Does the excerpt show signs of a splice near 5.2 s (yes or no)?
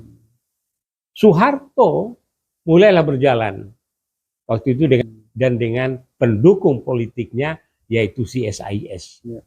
yes